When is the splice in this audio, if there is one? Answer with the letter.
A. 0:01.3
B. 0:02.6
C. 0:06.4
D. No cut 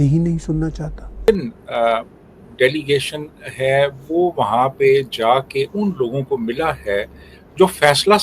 A